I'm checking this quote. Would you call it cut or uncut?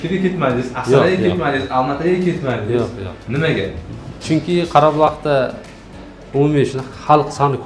uncut